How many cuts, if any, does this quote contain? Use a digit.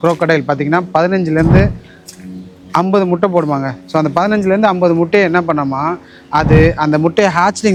0